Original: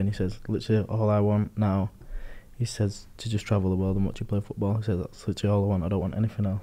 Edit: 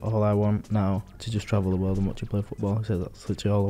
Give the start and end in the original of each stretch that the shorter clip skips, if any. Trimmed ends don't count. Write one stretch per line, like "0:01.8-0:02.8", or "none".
0:02.0-0:03.1